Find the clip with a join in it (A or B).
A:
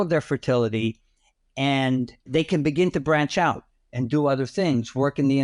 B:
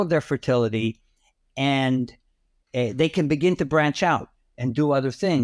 A